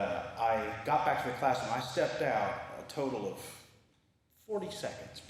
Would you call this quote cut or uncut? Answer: uncut